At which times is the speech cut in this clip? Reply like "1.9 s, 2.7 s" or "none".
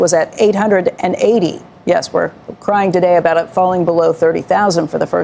none

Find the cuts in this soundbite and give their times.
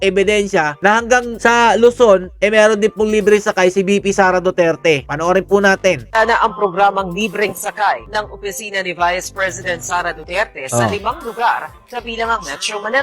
none

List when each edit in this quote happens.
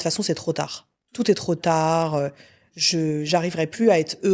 none

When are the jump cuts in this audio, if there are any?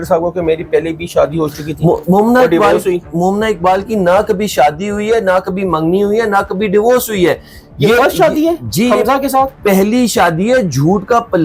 none

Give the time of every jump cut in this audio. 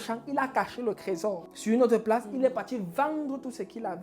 1.5 s

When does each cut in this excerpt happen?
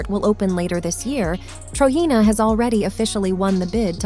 1.4 s

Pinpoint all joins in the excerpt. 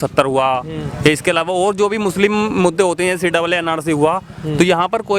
none

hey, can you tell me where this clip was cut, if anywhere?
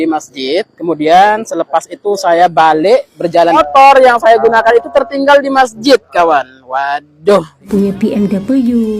3.6 s, 7.7 s

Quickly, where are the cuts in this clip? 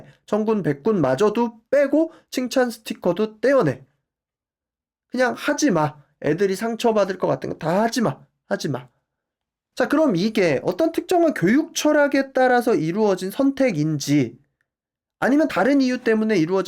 none

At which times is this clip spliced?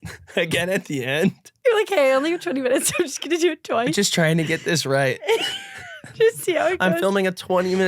1.5 s

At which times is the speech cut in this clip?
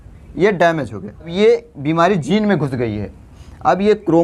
1.3 s

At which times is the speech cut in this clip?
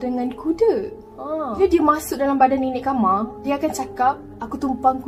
none

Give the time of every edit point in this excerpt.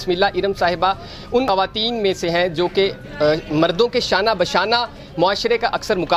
none

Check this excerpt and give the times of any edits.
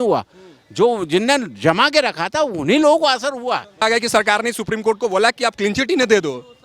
3.8 s

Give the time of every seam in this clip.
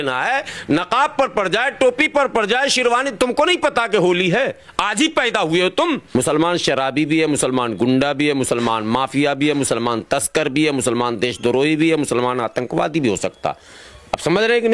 6.0 s

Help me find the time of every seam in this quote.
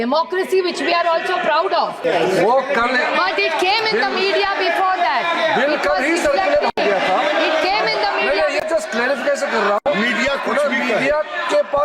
2.0 s

